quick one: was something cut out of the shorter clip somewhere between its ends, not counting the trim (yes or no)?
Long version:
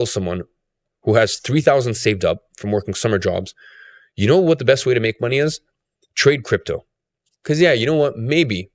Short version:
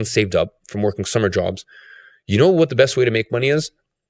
no